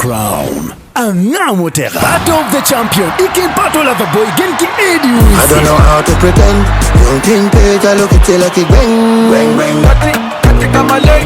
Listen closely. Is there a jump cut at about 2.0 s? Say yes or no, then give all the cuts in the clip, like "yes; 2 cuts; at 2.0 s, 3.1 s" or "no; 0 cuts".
yes; 1 cut; at 2.0 s